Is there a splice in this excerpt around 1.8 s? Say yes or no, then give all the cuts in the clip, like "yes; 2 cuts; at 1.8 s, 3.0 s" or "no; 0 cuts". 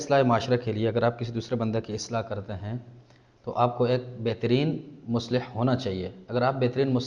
no; 0 cuts